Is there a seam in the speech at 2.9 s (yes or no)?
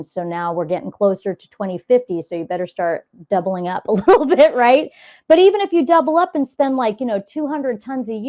no